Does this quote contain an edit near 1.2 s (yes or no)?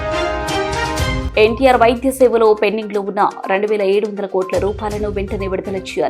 yes